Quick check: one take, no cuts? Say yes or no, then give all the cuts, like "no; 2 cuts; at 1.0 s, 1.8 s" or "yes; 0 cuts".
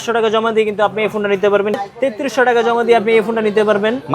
no; 1 cut; at 1.8 s